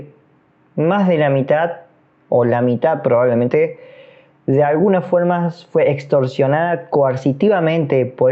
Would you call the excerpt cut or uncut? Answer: uncut